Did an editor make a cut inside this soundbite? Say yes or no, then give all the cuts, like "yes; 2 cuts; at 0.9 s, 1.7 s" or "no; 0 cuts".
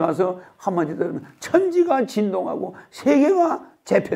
no; 0 cuts